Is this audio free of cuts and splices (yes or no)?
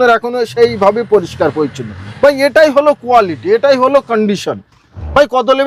yes